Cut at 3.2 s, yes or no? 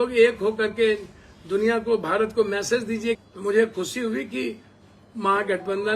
yes